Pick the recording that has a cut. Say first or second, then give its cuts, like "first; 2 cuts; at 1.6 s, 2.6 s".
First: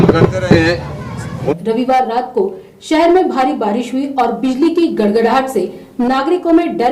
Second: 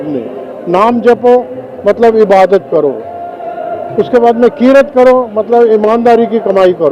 first; 1 cut; at 1.4 s